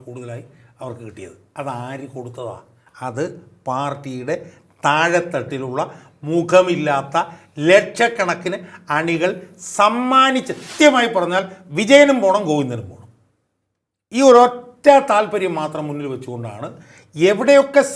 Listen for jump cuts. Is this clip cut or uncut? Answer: cut